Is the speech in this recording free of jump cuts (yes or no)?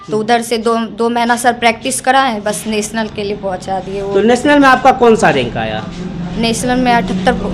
yes